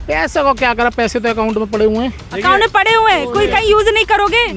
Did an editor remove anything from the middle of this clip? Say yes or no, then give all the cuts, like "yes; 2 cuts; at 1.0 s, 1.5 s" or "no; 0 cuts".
no; 0 cuts